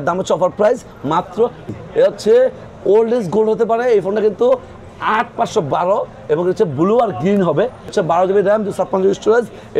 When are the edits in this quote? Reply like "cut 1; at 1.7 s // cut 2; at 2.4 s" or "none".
cut 1; at 1.7 s // cut 2; at 7.9 s